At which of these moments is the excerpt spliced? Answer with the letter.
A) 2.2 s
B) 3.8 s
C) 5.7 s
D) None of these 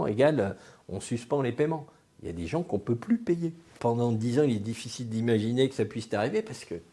B